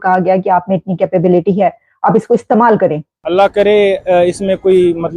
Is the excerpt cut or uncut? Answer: cut